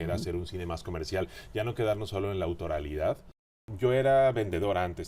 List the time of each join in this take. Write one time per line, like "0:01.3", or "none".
0:03.7